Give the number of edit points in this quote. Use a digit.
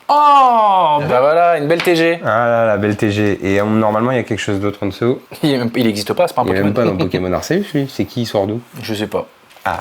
2